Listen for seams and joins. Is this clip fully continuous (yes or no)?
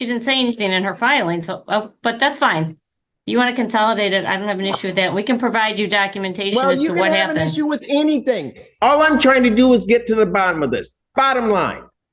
yes